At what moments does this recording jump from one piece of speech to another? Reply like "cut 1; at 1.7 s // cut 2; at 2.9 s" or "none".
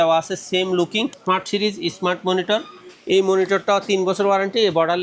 cut 1; at 1.2 s